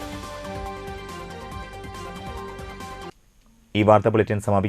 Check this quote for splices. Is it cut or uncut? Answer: uncut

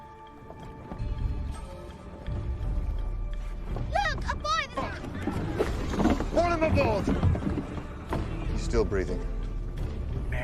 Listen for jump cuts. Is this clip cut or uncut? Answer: cut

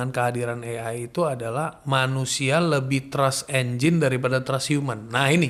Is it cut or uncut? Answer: uncut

